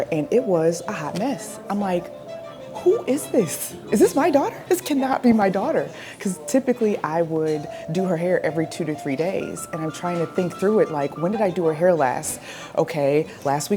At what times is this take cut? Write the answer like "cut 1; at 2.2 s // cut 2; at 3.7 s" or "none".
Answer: none